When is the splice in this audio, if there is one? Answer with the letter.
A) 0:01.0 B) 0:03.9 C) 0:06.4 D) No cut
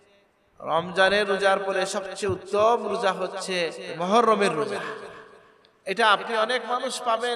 B